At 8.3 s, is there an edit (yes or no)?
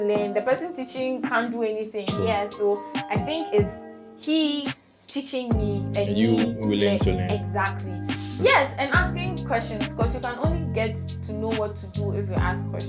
yes